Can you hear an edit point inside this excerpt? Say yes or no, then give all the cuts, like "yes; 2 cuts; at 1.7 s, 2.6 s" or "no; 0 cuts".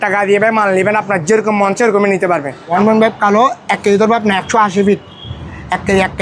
yes; 1 cut; at 2.6 s